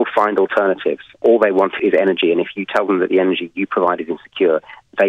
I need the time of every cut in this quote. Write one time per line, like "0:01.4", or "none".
none